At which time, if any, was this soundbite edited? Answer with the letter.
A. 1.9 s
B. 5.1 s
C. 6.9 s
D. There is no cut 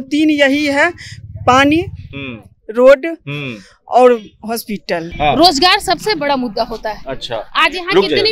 B